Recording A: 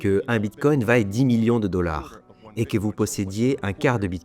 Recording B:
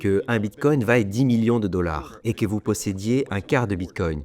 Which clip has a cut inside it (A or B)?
B